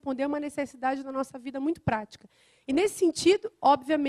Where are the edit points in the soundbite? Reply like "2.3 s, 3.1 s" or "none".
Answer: 1.4 s